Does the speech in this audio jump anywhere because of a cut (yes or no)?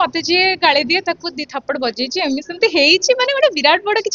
no